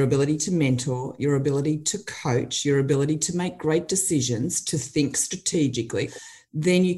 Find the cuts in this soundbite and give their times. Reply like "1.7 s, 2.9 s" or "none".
6.1 s